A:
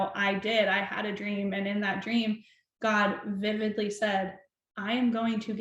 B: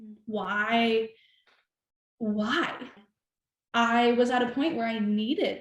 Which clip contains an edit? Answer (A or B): B